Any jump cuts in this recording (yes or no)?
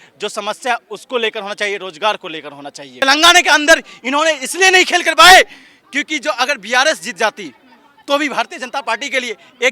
yes